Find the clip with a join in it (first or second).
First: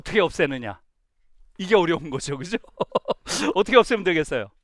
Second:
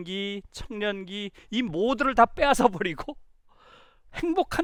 first